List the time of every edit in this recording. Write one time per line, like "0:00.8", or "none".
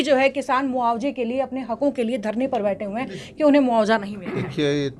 none